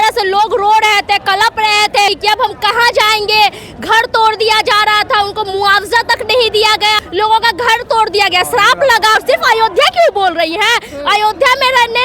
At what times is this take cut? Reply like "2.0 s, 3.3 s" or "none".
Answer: 2.1 s, 7.0 s, 9.2 s